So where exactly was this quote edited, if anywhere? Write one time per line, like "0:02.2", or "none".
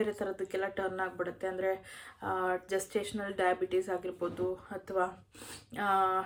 none